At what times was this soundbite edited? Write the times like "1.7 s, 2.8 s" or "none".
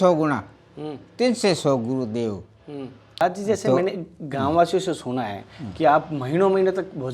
3.2 s